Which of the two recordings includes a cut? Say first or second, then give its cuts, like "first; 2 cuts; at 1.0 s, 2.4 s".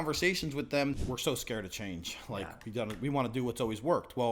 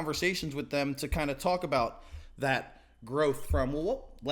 first; 1 cut; at 1.0 s